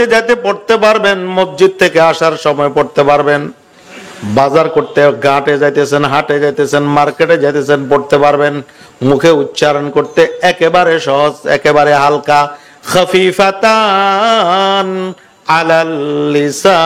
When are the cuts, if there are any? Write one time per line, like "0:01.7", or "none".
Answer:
none

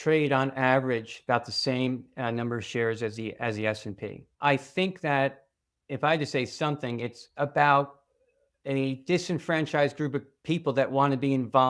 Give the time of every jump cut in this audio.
0:04.3
0:07.2

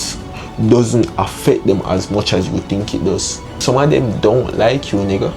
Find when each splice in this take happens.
0:03.6

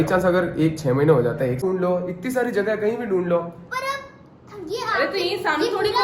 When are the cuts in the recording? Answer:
0:01.6

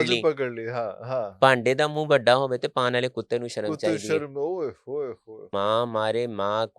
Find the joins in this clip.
0:05.4

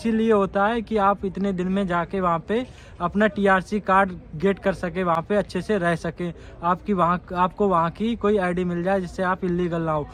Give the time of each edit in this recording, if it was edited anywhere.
none

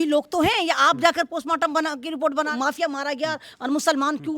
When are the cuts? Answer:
0:02.5

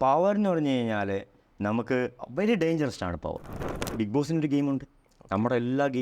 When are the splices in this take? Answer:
0:03.8

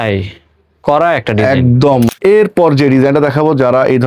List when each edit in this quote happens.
0:02.1

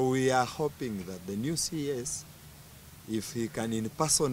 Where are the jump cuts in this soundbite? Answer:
none

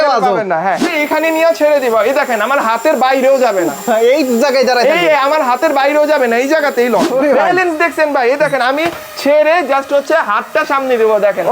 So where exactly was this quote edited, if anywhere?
0:00.9
0:07.1

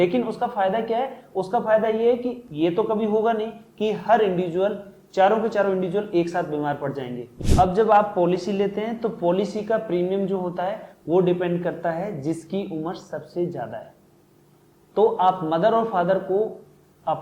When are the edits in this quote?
0:07.4

